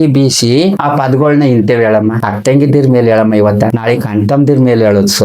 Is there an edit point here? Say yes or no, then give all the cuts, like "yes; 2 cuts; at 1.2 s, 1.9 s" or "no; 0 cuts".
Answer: yes; 3 cuts; at 0.8 s, 2.3 s, 3.8 s